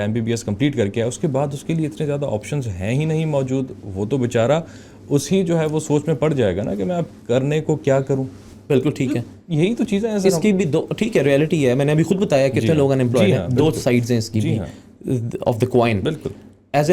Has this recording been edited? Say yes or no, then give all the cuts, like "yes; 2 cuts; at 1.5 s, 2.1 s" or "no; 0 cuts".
no; 0 cuts